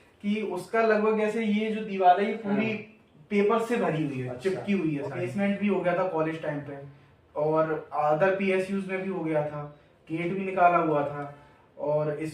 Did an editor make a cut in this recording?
yes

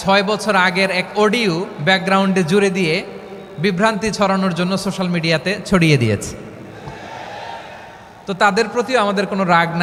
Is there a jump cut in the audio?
no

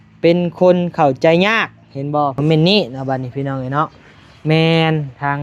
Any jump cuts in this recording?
yes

